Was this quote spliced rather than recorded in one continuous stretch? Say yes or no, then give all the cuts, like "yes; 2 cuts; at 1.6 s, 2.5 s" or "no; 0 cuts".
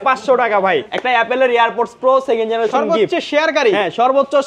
yes; 1 cut; at 0.9 s